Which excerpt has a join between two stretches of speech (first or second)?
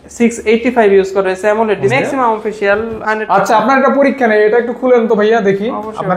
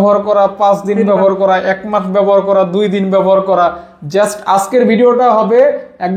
first